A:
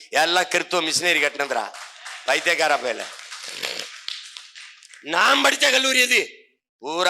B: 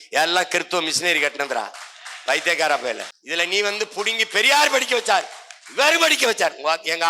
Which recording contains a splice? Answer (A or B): B